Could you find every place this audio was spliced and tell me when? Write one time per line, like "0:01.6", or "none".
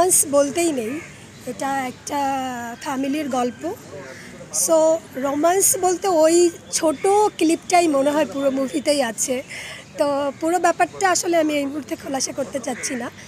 none